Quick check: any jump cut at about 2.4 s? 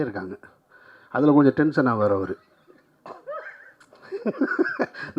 no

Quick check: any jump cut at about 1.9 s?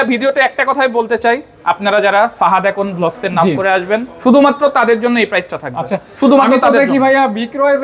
no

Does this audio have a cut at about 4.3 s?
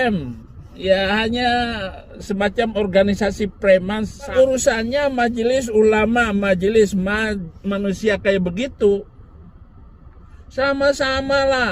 yes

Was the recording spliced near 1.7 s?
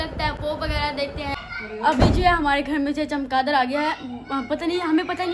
yes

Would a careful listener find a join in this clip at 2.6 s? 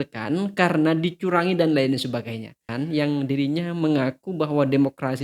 yes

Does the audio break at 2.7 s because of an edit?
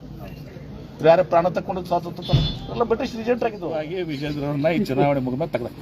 no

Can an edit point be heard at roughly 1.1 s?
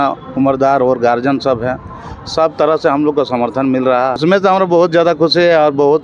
no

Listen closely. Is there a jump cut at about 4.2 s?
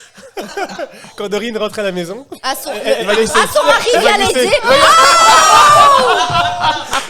no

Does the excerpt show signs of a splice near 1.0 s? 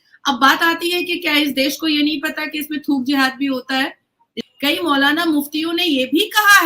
no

